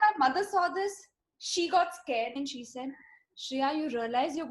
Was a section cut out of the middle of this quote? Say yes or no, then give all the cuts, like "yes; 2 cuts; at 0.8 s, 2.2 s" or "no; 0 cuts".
yes; 1 cut; at 2.4 s